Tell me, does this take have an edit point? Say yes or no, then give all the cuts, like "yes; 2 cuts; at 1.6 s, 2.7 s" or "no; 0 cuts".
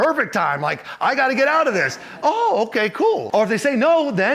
yes; 1 cut; at 3.2 s